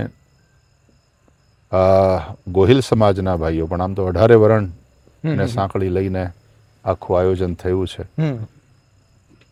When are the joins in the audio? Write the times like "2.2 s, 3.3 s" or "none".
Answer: none